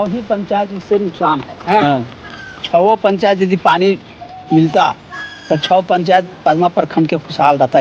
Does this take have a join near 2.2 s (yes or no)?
no